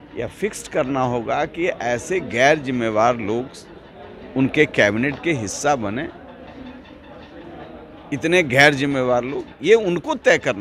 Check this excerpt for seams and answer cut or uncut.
uncut